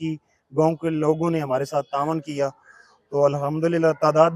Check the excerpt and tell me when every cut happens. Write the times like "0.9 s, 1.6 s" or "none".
none